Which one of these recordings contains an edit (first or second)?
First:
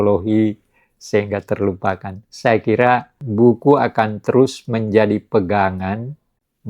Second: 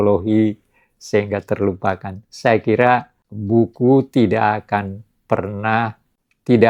first